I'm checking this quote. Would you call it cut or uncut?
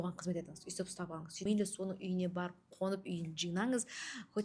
cut